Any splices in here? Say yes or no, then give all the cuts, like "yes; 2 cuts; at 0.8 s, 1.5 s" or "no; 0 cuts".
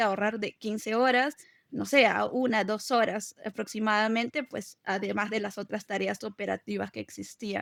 no; 0 cuts